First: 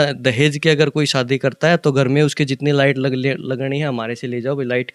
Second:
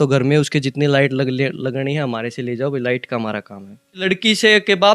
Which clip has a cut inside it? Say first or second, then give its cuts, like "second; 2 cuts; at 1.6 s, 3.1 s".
second; 1 cut; at 4.0 s